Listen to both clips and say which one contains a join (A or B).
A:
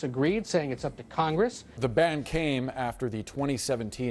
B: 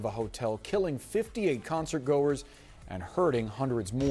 A